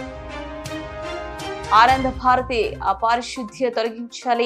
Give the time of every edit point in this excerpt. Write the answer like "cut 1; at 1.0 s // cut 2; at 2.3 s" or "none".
none